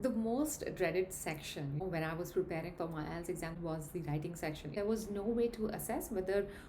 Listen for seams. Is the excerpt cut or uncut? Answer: cut